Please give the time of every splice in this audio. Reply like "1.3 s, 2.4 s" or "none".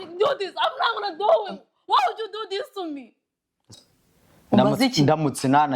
3.7 s